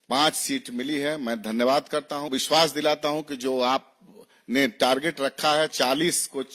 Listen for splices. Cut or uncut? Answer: cut